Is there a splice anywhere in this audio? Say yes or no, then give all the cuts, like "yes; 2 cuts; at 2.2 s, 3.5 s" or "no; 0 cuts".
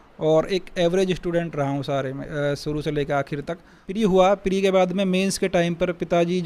yes; 1 cut; at 3.9 s